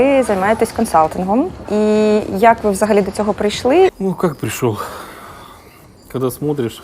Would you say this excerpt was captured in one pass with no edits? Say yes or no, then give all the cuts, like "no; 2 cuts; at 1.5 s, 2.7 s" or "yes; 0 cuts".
no; 2 cuts; at 1.6 s, 3.9 s